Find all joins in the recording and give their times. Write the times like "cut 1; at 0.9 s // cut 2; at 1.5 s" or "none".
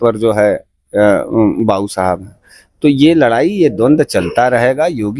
none